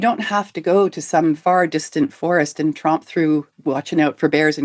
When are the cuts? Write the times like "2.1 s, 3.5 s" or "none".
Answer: 1.4 s